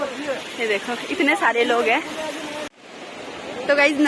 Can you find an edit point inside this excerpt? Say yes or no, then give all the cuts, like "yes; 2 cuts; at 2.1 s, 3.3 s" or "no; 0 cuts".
yes; 1 cut; at 2.7 s